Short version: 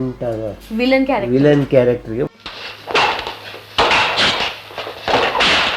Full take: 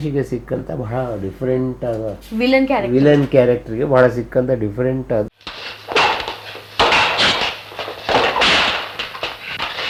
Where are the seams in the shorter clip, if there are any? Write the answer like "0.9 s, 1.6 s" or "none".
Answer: 2.3 s